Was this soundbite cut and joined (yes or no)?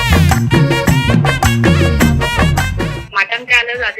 yes